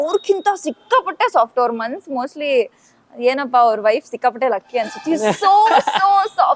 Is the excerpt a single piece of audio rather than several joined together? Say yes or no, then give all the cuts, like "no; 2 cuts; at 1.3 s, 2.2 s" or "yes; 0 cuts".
yes; 0 cuts